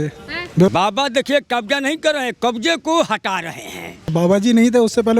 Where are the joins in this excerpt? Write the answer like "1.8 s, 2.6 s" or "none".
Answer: 0.7 s, 4.1 s